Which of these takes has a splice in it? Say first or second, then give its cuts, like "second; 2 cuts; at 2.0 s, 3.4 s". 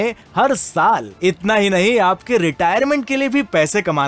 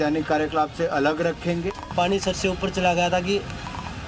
second; 1 cut; at 1.8 s